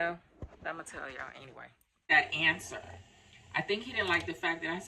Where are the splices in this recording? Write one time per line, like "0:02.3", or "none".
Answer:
0:02.1